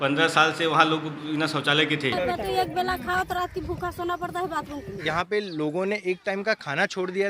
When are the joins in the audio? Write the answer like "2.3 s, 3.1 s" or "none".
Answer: 2.2 s, 4.9 s

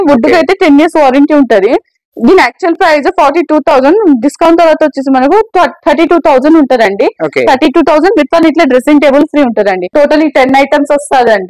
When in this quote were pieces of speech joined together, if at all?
9.8 s

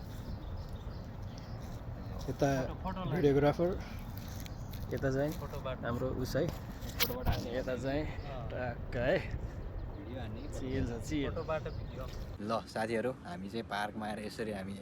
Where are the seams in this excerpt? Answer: 12.2 s

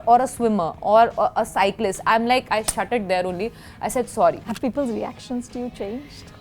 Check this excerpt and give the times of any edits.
4.5 s

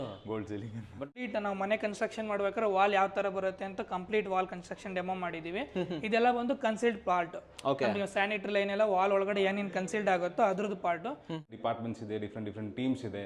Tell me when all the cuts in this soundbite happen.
1.2 s, 11.5 s

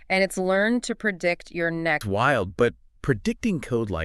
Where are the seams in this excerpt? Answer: 2.0 s

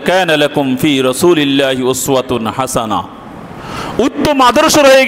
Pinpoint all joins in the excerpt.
none

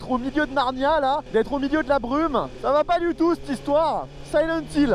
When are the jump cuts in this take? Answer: 1.2 s, 2.5 s

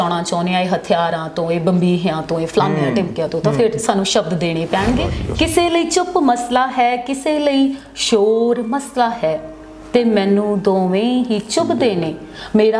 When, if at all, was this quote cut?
5.2 s

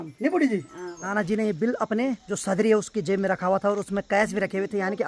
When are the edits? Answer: 1.1 s, 2.3 s

